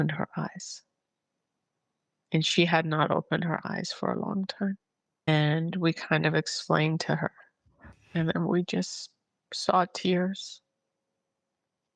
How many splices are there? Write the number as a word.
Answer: one